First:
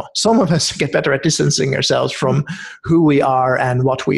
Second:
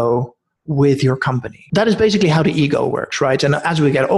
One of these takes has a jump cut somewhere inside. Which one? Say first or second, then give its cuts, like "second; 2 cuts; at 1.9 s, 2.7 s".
second; 1 cut; at 1.5 s